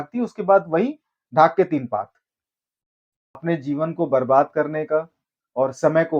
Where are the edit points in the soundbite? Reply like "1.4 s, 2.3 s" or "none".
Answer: 3.4 s